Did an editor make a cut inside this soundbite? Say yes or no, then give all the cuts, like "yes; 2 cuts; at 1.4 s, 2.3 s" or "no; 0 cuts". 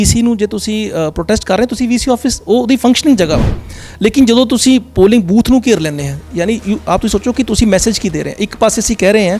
no; 0 cuts